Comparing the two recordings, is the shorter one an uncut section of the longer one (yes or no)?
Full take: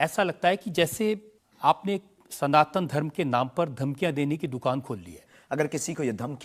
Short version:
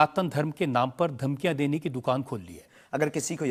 yes